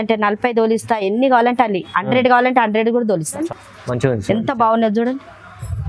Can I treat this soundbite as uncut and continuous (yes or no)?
no